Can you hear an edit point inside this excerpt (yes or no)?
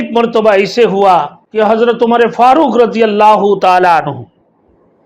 yes